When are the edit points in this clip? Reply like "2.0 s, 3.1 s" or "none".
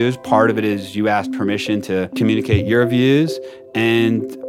2.1 s